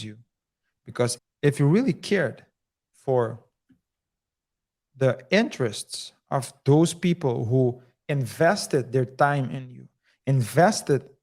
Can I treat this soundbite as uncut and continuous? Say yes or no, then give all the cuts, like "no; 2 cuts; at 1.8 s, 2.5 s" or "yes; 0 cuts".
no; 1 cut; at 1.1 s